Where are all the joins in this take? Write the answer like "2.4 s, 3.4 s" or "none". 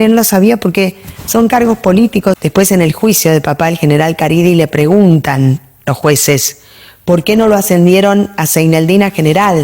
2.4 s

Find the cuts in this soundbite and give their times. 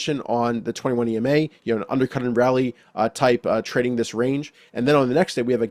none

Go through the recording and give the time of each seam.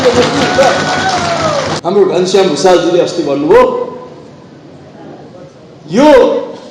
1.8 s

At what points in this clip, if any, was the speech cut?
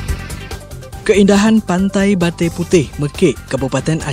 1.0 s

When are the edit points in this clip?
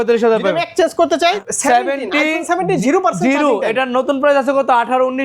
1.4 s

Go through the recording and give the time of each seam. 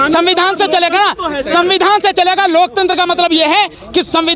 1.8 s

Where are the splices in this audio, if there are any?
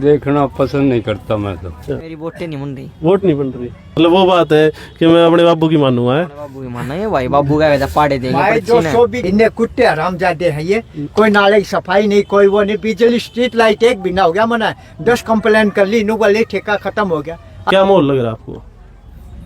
1.6 s, 4.0 s, 9.2 s, 17.6 s

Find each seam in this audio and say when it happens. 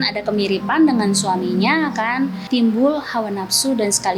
2.4 s

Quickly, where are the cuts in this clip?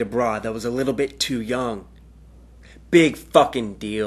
none

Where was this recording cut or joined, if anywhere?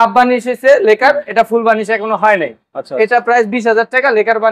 none

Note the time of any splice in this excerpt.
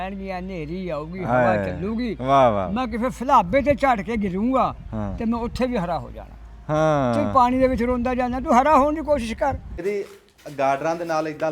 9.7 s

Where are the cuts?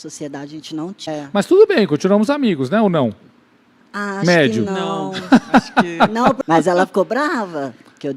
1.2 s, 6.4 s

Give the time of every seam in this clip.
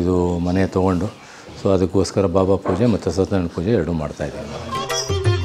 4.5 s

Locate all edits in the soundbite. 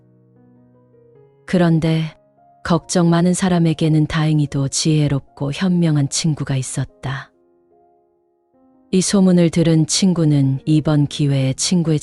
7.3 s, 8.9 s

